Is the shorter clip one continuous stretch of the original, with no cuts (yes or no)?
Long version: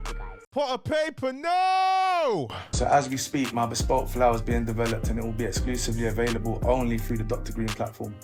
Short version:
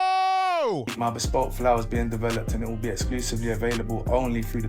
no